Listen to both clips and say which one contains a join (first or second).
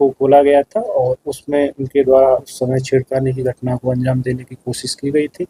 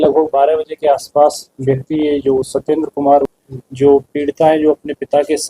second